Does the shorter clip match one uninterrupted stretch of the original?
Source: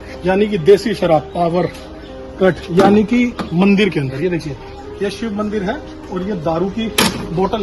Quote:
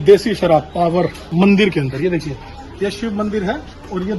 no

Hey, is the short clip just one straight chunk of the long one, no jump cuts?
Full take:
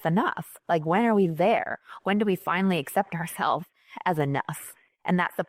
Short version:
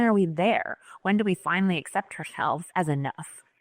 no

